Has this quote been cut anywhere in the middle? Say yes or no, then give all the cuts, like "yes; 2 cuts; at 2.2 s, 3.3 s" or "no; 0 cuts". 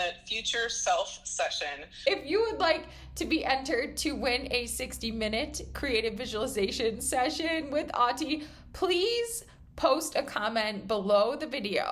yes; 1 cut; at 2.1 s